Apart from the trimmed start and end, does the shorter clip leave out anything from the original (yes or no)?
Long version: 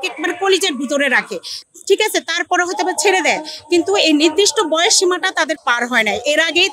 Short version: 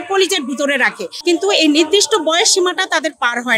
yes